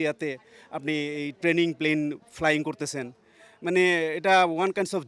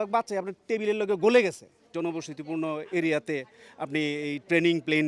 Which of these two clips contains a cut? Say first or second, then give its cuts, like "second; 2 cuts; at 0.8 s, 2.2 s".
second; 1 cut; at 1.9 s